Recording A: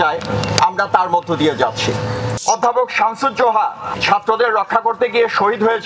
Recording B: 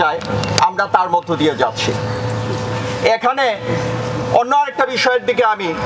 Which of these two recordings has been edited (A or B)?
A